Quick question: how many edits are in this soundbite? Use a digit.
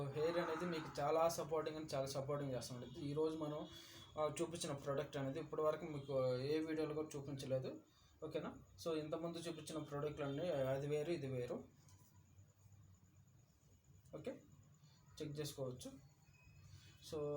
0